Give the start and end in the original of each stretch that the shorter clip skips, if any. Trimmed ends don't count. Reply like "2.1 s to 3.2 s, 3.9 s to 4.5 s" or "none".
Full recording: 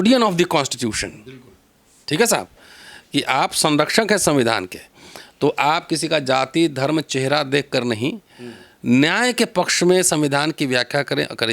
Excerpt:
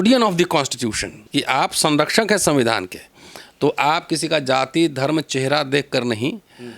1.1 s to 2.9 s